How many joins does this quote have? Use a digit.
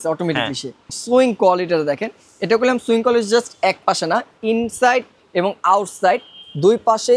1